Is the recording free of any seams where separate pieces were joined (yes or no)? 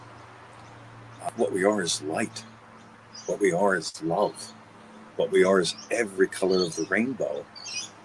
no